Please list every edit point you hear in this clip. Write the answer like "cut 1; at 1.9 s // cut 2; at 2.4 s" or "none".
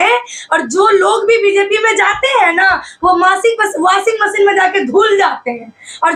none

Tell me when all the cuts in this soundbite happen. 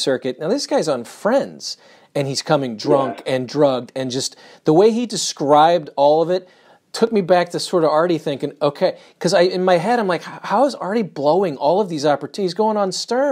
none

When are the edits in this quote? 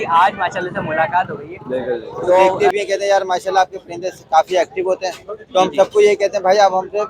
cut 1; at 2.6 s

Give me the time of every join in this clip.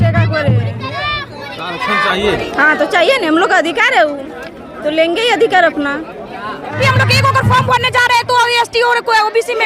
cut 1; at 6.8 s

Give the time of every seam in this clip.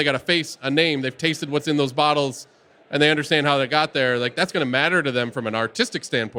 none

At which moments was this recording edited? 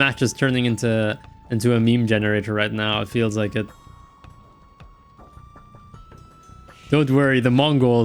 none

